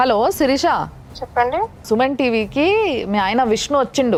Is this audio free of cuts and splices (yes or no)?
yes